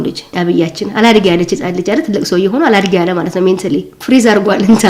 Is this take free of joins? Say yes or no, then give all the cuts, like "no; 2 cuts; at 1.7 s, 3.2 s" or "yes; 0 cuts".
yes; 0 cuts